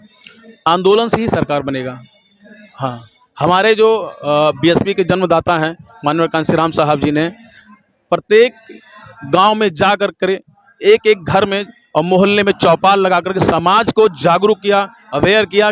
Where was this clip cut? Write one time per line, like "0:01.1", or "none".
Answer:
none

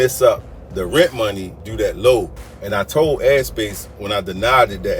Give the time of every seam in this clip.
0:01.6

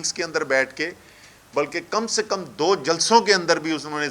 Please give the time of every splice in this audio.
none

